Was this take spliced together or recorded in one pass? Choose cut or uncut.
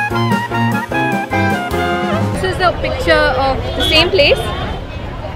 cut